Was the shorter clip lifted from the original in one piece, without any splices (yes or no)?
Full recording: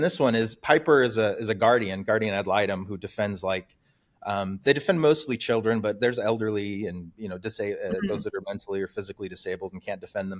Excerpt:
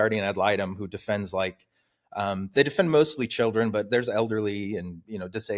yes